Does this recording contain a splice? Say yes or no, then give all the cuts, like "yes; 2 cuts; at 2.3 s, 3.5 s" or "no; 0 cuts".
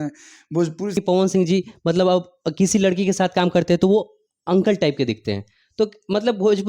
yes; 1 cut; at 0.9 s